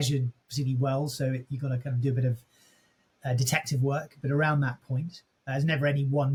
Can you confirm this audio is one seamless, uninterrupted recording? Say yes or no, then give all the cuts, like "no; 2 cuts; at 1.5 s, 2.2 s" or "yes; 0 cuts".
yes; 0 cuts